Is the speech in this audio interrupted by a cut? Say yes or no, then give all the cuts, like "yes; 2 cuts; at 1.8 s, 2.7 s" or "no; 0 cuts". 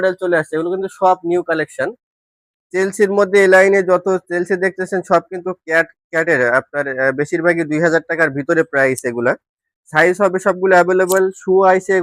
no; 0 cuts